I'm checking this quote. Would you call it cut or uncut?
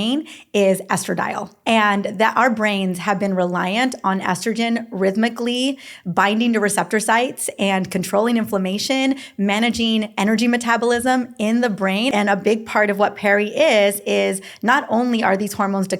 cut